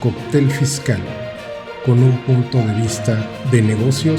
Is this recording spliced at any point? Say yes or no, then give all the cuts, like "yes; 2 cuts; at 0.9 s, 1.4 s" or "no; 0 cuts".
no; 0 cuts